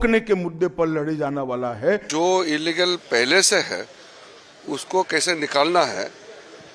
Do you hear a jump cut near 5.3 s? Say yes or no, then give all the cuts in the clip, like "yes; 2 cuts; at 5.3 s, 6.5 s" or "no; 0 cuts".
no; 1 cut; at 2.1 s